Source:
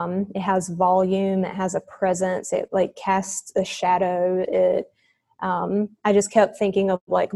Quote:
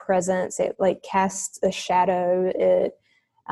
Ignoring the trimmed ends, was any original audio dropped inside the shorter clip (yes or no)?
no